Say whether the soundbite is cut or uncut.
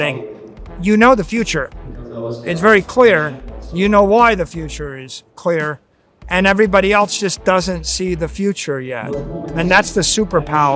uncut